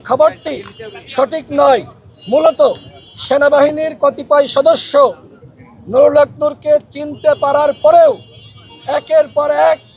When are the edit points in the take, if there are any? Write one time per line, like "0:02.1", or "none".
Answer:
none